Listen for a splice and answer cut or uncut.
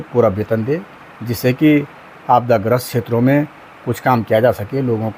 uncut